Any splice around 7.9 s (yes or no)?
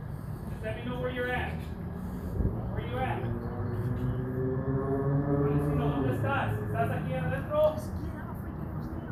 no